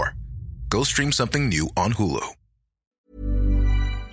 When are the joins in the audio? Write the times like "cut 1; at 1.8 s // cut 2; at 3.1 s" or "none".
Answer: cut 1; at 3.1 s